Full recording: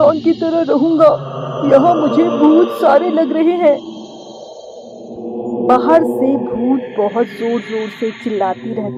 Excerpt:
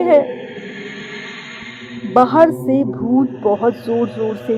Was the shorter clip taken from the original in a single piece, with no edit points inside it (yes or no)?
yes